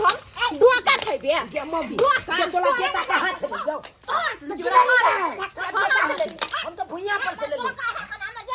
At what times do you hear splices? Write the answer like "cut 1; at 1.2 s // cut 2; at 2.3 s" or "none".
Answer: none

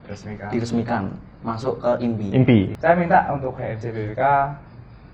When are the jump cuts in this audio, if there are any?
cut 1; at 2.7 s

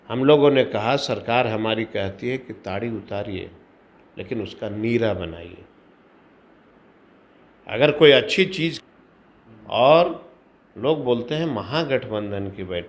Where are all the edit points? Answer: cut 1; at 8.8 s

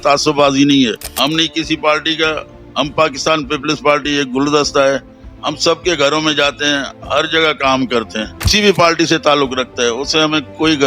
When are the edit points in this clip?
cut 1; at 1.1 s // cut 2; at 8.5 s

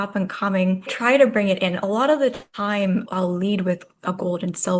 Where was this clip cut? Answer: cut 1; at 0.9 s // cut 2; at 3.1 s

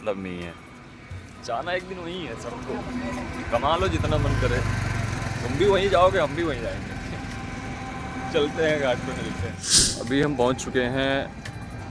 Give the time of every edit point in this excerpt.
none

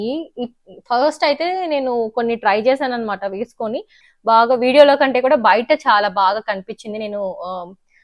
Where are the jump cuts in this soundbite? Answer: cut 1; at 4.0 s

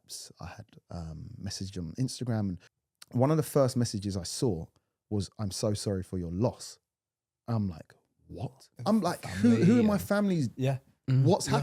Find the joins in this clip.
cut 1; at 2.7 s // cut 2; at 8.7 s

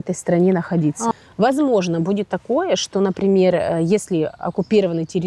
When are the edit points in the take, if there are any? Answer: cut 1; at 1.1 s

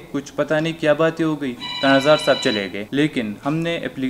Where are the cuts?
cut 1; at 2.8 s

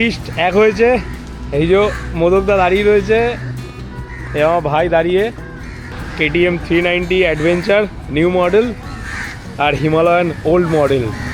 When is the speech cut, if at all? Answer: cut 1; at 5.5 s

